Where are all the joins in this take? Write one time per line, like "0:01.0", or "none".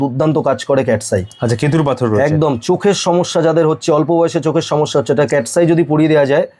none